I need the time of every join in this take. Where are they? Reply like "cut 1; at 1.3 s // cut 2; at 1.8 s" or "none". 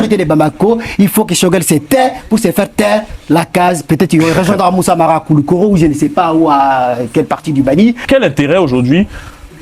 cut 1; at 8.0 s